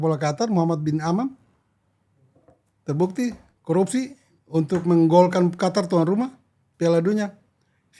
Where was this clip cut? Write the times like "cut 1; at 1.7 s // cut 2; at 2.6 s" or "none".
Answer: none